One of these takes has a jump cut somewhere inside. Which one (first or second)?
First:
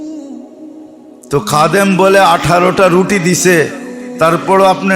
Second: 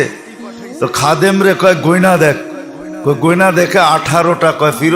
first